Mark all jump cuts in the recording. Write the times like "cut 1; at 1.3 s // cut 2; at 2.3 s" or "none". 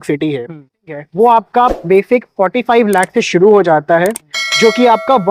cut 1; at 0.9 s